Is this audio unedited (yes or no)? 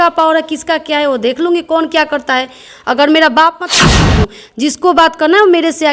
no